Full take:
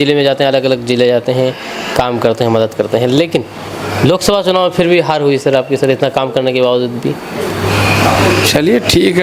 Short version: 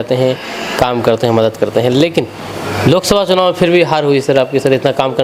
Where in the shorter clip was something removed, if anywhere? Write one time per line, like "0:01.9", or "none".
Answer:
none